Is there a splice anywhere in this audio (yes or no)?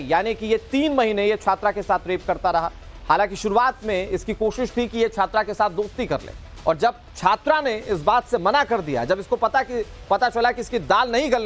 yes